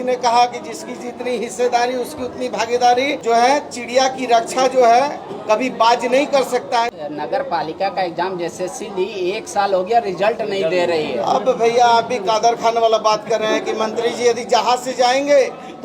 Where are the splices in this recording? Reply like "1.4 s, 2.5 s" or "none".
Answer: 3.2 s, 6.9 s